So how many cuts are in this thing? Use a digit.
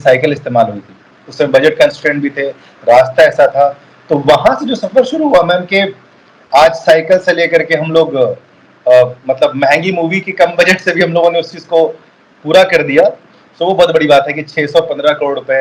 0